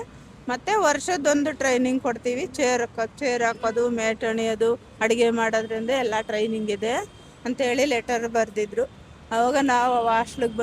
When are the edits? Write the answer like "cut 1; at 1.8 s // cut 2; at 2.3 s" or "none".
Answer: none